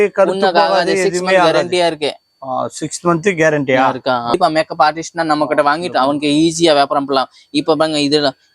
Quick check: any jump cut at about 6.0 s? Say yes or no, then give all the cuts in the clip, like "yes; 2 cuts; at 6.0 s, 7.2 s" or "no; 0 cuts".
no; 1 cut; at 4.4 s